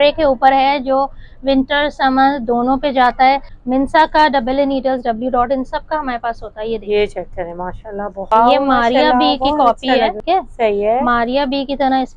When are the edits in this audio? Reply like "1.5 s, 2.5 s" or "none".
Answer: 3.5 s, 8.3 s, 10.2 s